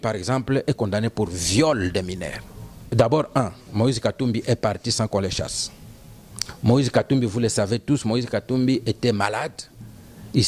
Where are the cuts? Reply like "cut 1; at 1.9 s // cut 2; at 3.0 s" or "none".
cut 1; at 2.8 s